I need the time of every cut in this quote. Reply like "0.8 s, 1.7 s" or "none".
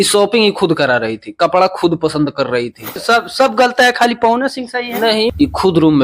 3.0 s, 5.3 s